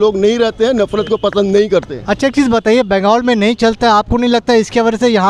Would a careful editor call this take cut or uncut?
uncut